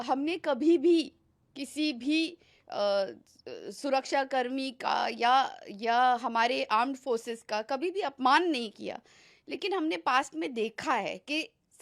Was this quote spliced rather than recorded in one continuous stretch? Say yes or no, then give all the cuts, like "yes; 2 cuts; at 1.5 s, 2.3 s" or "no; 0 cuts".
no; 0 cuts